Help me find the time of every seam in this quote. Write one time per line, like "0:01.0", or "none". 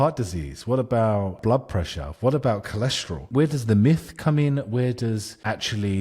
0:01.4
0:03.3

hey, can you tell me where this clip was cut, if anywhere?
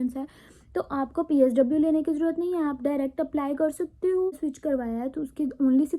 0:04.5

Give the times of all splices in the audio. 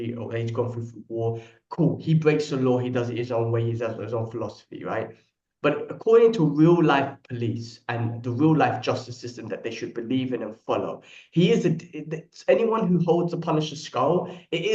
none

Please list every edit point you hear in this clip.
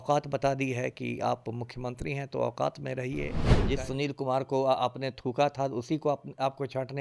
0:03.5

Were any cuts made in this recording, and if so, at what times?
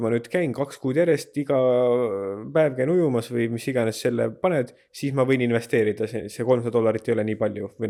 none

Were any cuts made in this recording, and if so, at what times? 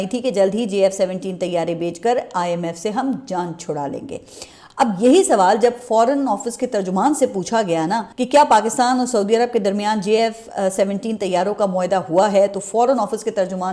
none

